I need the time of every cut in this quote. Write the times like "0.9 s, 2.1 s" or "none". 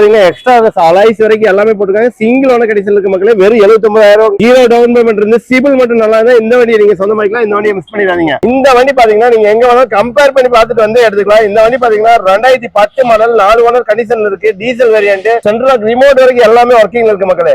4.4 s, 8.4 s, 15.4 s